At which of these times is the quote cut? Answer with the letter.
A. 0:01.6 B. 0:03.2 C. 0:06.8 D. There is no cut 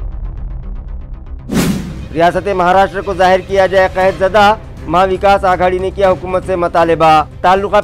A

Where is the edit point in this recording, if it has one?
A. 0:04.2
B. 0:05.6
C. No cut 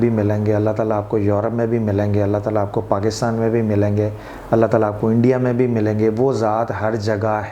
C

